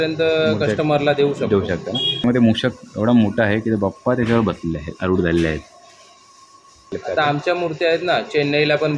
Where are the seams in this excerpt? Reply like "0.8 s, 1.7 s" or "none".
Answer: 2.2 s, 6.9 s